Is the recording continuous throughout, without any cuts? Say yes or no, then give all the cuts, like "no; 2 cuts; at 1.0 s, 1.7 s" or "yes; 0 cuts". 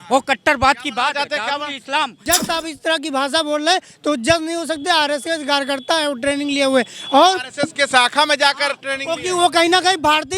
no; 1 cut; at 2.2 s